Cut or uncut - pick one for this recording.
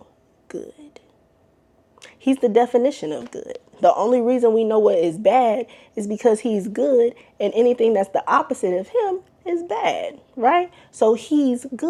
uncut